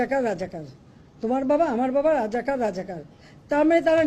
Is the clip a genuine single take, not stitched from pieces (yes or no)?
yes